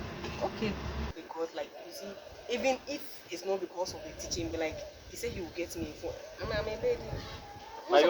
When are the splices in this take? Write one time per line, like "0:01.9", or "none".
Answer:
0:01.1